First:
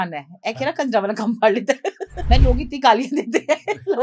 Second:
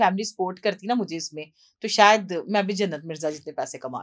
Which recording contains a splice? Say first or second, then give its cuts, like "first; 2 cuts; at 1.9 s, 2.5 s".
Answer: first; 1 cut; at 2.3 s